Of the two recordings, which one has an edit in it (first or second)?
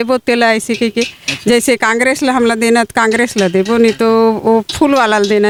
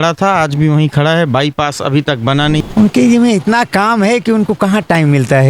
second